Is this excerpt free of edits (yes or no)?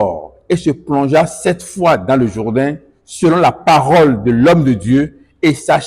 yes